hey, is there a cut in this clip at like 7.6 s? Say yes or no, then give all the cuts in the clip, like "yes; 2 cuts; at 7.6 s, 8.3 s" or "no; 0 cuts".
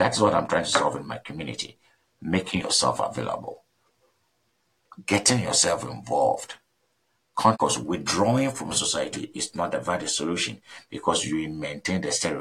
yes; 1 cut; at 7.6 s